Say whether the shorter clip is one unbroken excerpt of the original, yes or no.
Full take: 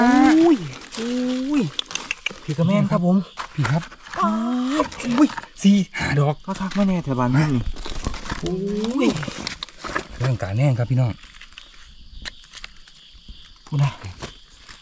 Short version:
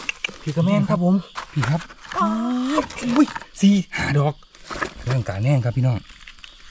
no